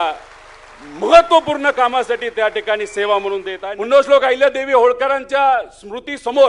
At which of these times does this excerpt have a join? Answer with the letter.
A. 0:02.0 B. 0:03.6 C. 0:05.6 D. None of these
B